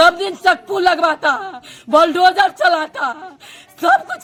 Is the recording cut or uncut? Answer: uncut